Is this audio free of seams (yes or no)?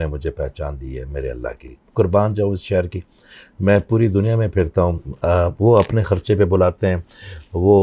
yes